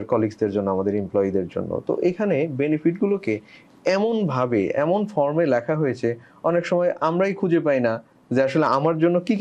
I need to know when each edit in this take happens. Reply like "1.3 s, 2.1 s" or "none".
none